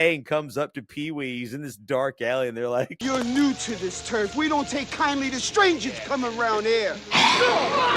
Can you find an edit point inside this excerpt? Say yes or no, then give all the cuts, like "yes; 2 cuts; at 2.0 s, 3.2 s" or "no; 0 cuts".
yes; 2 cuts; at 3.0 s, 7.0 s